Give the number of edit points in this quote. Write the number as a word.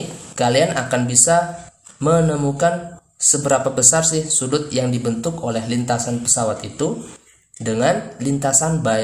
zero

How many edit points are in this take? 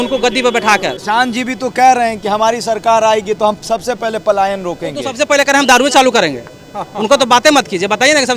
one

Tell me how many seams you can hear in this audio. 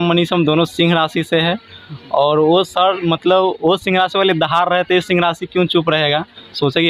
zero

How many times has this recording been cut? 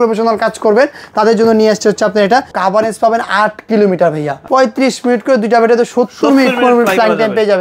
two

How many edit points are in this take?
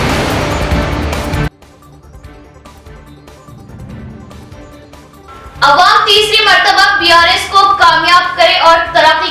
one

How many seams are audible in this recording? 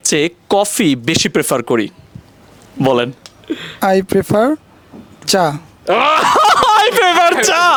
zero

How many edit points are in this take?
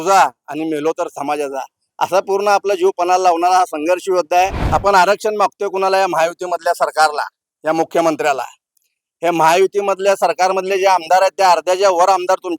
one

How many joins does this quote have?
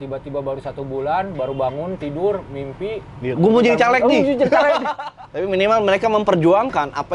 one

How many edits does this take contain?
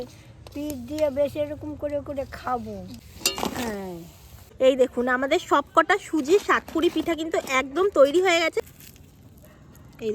three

